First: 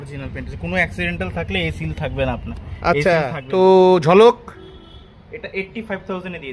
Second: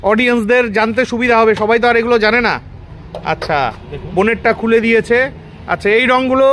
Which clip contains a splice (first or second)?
first